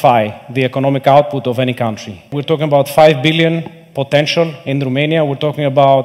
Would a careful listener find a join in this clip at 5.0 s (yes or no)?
no